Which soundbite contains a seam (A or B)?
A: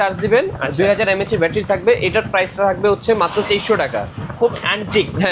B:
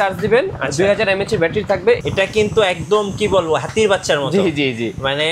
B